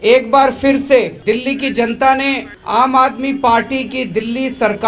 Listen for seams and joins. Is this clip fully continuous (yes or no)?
no